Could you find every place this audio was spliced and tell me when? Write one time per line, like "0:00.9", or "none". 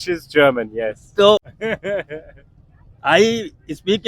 0:01.5